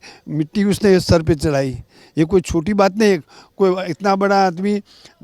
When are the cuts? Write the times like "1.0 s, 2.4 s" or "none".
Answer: none